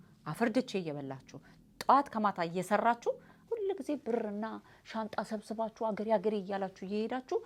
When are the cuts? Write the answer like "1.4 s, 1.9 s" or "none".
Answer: 3.3 s